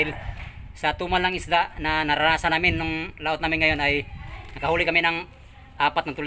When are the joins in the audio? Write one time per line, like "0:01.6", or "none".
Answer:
none